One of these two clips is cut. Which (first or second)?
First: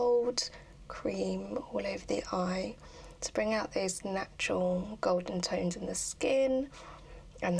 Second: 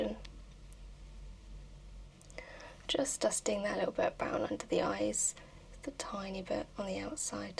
second